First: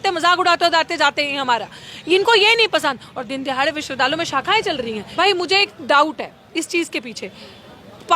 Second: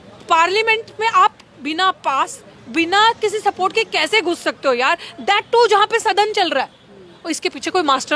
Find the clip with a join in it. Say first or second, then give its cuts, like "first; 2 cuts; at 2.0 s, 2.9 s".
first; 1 cut; at 5.1 s